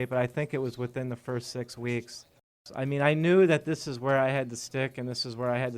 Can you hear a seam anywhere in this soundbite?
yes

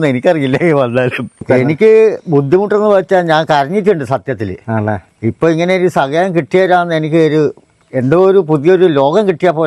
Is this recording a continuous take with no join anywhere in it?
no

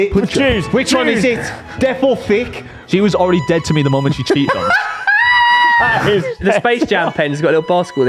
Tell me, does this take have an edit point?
yes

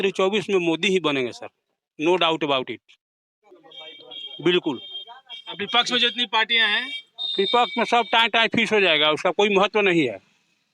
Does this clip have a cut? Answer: no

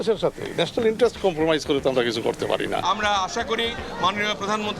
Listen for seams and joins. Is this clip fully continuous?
no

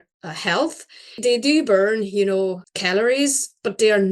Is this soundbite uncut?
no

